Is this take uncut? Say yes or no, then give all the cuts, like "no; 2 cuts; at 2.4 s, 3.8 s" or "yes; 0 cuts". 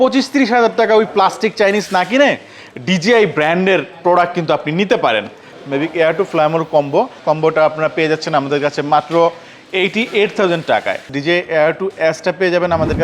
no; 3 cuts; at 5.6 s, 7.2 s, 11.1 s